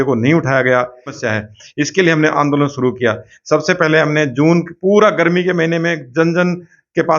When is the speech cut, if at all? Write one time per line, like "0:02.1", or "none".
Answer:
0:01.2